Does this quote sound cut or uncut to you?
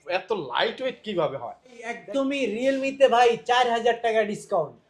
cut